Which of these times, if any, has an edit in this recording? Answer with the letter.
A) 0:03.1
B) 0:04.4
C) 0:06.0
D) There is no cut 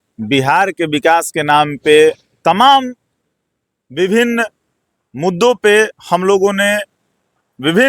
D